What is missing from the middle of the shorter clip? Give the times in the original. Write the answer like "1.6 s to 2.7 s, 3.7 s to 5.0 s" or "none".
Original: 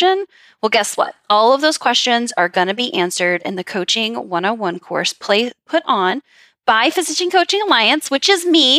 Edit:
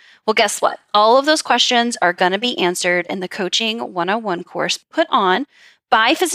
5.2 s to 5.6 s